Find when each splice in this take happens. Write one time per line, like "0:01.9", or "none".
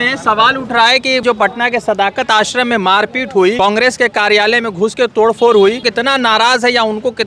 0:01.2
0:03.6
0:05.9